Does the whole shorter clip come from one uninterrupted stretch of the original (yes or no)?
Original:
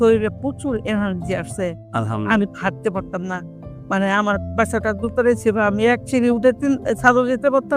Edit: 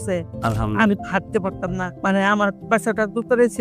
no